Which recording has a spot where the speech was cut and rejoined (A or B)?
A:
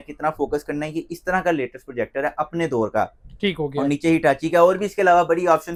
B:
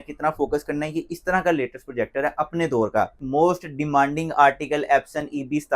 B